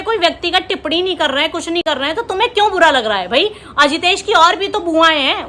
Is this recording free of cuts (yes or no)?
yes